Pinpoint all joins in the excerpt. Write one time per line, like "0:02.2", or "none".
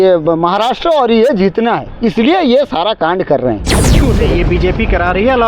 0:04.0